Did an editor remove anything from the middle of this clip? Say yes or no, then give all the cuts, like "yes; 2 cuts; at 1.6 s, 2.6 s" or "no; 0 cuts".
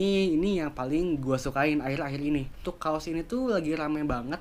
yes; 1 cut; at 2.7 s